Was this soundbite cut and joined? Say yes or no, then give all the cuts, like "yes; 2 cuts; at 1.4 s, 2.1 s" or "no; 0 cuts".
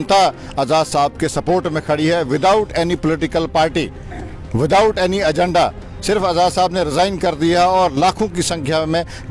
no; 0 cuts